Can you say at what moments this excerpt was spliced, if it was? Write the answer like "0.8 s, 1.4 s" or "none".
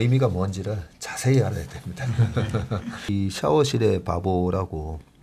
3.0 s